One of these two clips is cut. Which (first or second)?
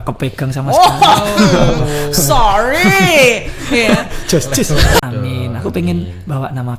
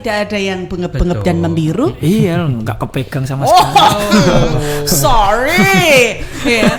first